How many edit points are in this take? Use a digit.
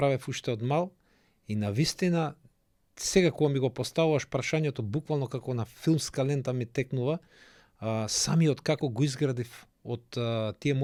0